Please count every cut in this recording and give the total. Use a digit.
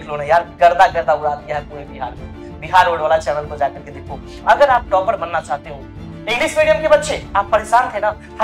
1